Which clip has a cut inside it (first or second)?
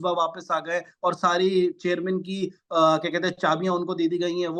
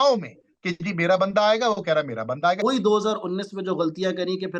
second